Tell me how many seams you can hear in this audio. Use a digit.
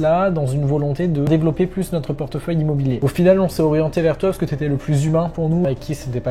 3